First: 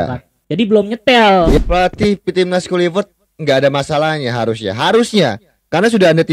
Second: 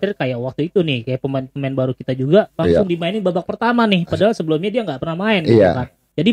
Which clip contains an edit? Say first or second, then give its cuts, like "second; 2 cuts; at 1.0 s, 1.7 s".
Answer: first; 1 cut; at 1.6 s